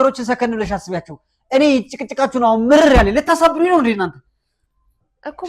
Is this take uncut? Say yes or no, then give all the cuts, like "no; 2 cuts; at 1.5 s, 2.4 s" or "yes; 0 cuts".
yes; 0 cuts